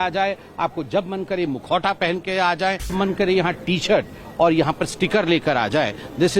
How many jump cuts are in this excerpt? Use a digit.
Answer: 1